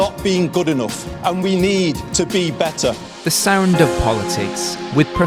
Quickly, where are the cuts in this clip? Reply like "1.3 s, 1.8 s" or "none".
none